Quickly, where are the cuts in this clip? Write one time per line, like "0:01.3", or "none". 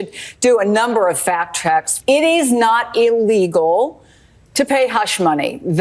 0:01.9